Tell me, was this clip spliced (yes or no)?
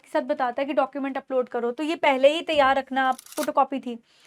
yes